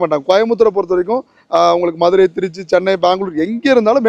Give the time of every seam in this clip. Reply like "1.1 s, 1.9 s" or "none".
none